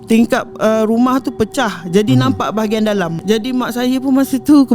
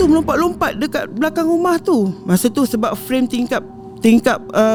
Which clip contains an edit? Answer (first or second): first